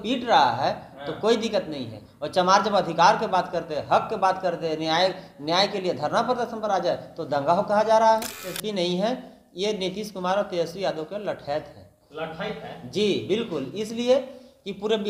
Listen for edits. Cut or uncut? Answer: cut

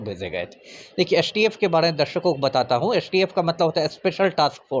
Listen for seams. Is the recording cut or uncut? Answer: uncut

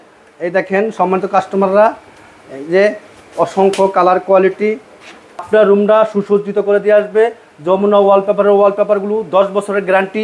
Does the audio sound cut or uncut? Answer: cut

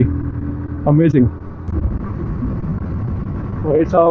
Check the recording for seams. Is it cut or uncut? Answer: cut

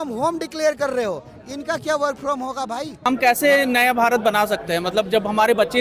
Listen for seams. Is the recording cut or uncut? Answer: cut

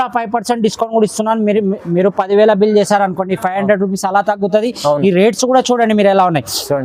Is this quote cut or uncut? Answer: uncut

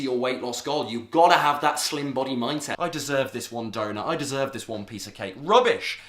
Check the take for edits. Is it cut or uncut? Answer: cut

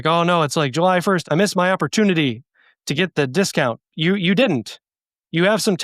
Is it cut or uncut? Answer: cut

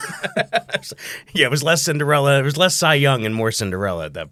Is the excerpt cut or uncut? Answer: uncut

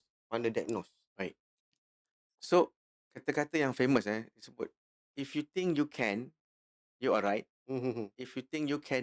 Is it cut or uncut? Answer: uncut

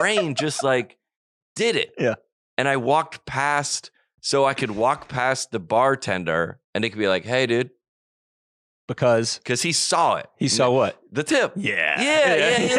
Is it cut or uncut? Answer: uncut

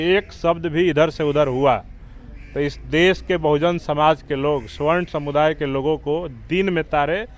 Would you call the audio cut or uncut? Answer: uncut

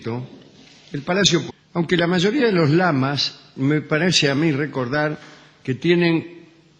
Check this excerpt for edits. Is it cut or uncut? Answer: uncut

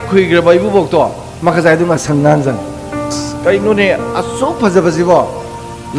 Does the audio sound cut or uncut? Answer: cut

